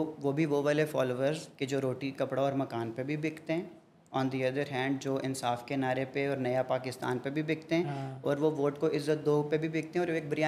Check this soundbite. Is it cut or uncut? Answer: uncut